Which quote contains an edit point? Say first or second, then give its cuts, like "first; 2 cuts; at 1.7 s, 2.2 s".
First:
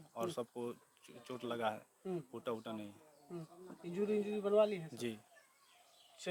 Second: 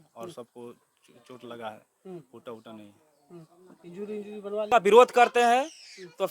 second; 1 cut; at 4.6 s